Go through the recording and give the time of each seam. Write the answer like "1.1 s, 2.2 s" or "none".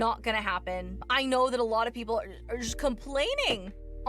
1.1 s